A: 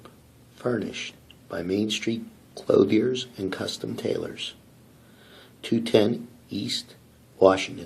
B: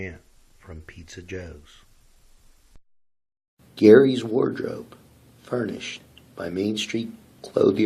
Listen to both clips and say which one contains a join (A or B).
B